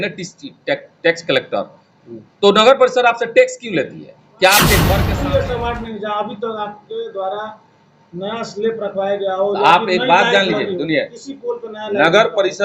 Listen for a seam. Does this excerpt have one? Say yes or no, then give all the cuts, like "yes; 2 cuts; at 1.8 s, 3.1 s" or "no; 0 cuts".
yes; 1 cut; at 4.9 s